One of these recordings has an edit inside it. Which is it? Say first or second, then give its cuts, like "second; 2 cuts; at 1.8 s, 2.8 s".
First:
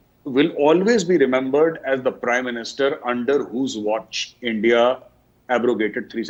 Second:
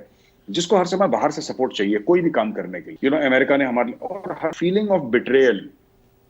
second; 2 cuts; at 2.8 s, 4.5 s